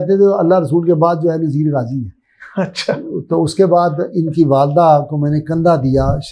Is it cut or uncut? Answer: uncut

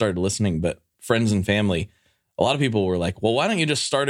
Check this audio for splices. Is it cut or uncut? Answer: uncut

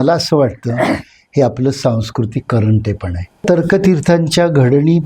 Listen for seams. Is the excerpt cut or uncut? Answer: cut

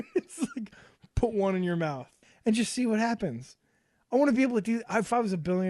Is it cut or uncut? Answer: cut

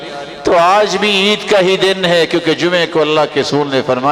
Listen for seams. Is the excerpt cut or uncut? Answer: uncut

